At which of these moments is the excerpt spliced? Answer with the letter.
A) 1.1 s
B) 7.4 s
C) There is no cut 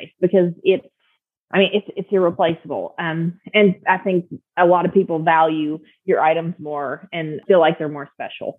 B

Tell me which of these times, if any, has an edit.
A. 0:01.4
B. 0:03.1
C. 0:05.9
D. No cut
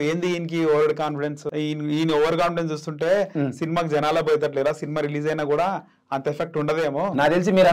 A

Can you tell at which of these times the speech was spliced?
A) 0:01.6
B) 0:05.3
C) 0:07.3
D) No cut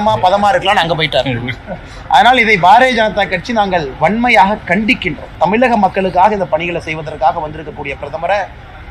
B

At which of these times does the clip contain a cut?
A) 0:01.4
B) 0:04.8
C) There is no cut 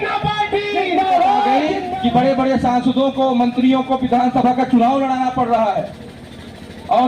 A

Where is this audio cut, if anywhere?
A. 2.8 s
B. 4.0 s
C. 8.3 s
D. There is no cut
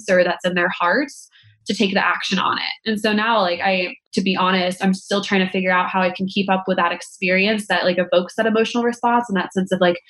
B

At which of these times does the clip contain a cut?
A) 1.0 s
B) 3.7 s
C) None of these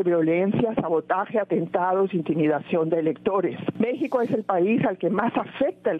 B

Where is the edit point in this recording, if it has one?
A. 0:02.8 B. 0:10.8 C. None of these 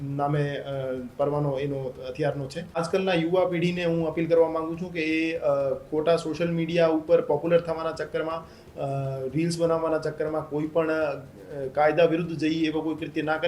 A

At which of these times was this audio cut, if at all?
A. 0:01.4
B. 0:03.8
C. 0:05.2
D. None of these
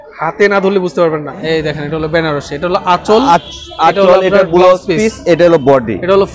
A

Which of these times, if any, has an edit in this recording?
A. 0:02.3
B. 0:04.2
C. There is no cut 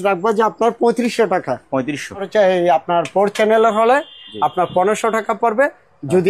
A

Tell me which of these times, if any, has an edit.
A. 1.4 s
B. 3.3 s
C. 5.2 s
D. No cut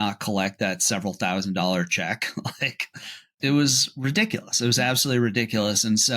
B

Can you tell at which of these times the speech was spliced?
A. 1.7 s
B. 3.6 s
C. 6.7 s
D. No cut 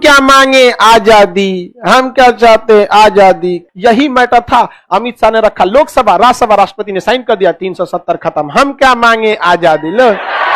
B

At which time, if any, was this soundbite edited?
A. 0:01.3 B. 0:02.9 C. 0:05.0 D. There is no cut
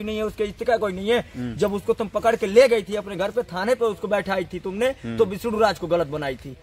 D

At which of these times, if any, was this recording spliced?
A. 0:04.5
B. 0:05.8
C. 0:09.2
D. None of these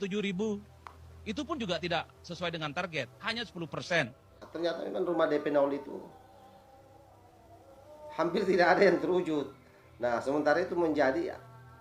A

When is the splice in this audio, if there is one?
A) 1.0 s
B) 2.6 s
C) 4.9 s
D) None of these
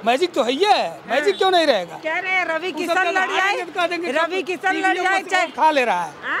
D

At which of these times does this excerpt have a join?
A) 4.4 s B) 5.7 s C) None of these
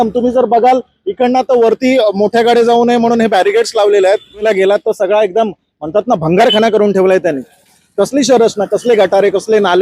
A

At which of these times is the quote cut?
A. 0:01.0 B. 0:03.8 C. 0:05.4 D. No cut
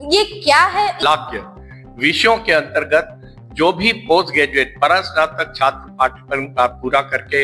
A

